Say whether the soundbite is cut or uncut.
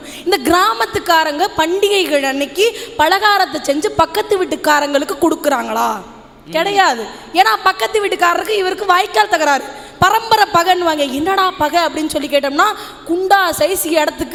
uncut